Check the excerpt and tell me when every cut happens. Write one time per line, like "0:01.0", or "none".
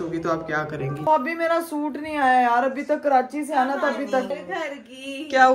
0:01.1
0:04.3